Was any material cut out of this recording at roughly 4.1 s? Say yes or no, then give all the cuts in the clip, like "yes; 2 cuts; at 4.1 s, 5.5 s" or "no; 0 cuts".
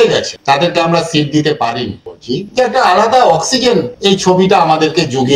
no; 1 cut; at 2.1 s